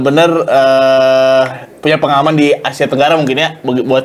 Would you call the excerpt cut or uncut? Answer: uncut